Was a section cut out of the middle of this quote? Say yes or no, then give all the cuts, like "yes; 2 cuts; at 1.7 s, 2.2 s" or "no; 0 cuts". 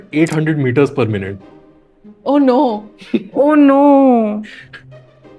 no; 0 cuts